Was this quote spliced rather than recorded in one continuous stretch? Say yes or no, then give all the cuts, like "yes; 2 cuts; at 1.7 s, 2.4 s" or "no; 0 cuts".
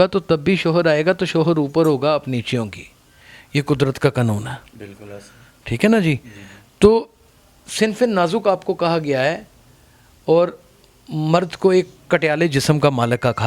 no; 0 cuts